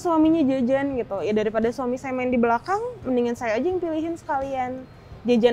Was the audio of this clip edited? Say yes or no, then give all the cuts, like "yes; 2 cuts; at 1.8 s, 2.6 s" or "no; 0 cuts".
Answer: no; 0 cuts